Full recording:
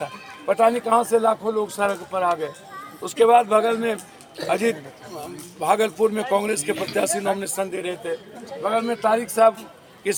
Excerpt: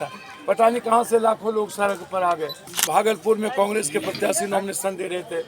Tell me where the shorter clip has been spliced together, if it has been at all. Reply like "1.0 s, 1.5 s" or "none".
2.7 s

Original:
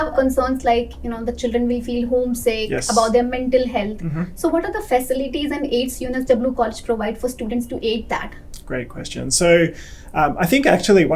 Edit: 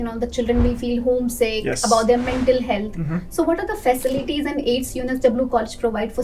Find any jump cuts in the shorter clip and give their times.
none

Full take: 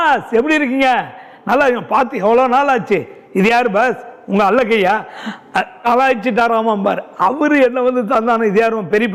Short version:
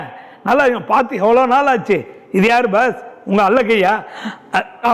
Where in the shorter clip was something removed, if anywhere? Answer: none

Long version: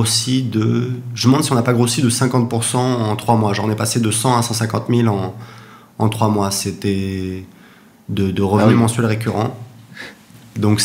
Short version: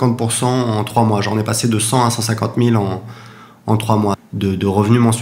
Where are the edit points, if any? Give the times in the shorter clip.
4.2 s

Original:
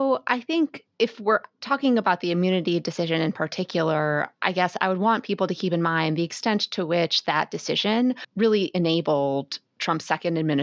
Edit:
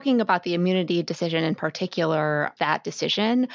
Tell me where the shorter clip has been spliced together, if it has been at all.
2.5 s

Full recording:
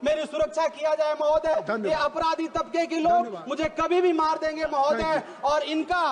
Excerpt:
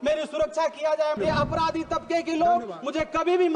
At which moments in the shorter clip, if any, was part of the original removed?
1.2 s

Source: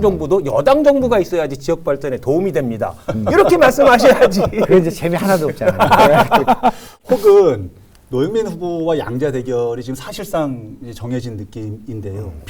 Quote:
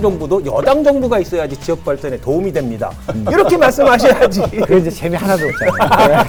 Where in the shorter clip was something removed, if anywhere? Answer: none

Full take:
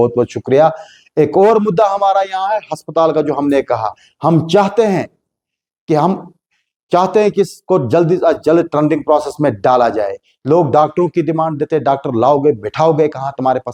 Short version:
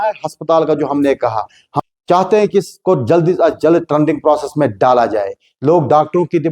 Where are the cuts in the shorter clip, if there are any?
1.6 s

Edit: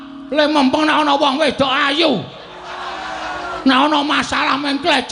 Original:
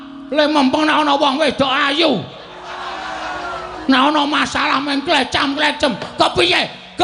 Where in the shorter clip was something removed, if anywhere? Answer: 3.6 s

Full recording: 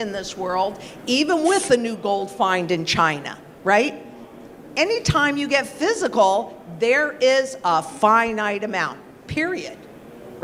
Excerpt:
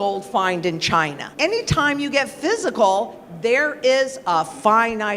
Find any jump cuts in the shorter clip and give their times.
1.2 s

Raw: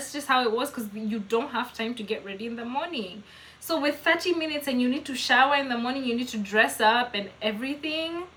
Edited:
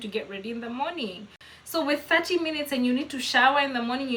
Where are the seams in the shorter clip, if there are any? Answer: none

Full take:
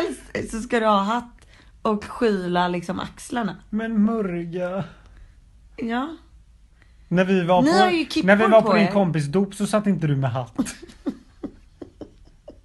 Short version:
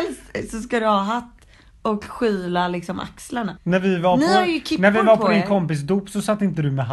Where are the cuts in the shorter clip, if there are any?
3.6 s

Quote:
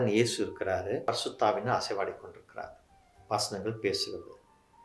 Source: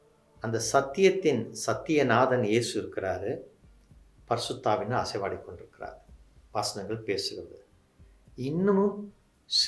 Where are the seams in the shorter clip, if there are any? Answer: 1.1 s

